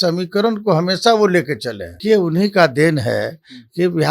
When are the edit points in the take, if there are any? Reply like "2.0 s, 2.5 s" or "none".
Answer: 2.0 s